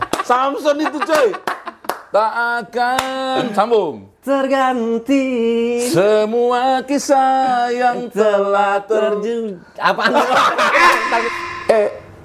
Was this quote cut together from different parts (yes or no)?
yes